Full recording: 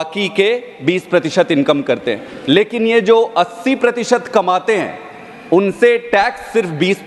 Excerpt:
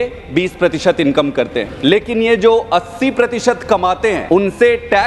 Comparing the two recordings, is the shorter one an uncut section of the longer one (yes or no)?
no